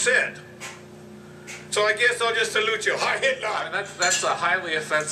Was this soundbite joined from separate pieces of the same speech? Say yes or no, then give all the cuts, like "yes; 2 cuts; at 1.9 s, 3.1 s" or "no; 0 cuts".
yes; 1 cut; at 3.7 s